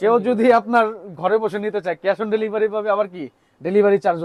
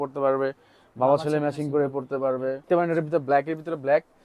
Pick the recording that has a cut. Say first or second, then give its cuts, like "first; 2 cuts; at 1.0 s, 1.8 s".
second; 1 cut; at 2.7 s